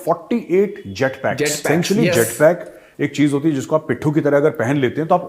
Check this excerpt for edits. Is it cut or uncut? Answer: cut